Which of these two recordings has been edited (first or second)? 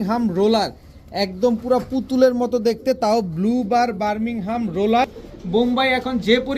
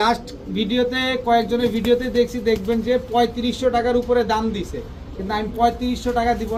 first